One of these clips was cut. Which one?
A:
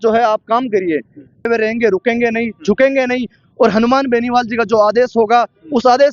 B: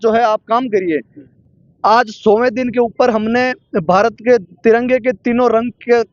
A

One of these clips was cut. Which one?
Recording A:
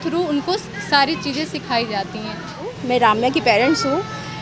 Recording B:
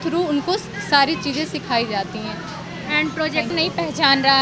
A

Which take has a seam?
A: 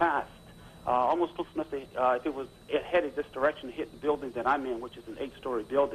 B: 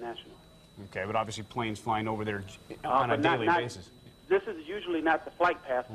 A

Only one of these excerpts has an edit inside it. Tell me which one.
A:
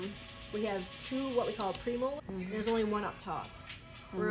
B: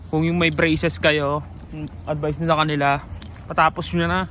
A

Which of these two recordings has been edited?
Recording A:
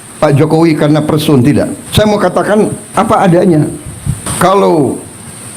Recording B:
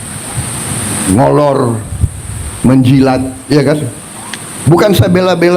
A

